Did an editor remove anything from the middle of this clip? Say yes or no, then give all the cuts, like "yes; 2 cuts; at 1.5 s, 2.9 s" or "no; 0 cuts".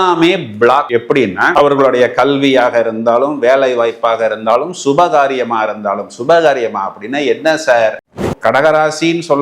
yes; 1 cut; at 8.0 s